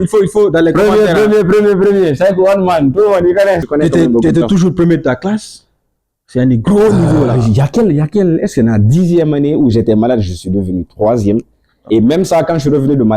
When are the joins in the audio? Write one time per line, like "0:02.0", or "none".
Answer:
0:03.7

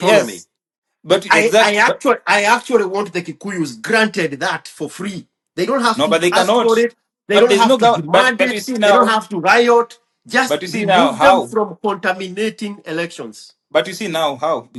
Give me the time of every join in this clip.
none

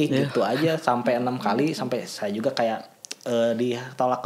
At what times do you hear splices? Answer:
none

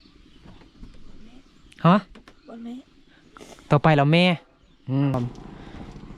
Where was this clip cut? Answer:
0:05.1

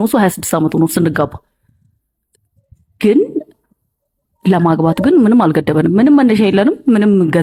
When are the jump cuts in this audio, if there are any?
none

